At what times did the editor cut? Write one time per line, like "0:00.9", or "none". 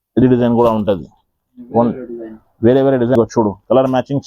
0:03.2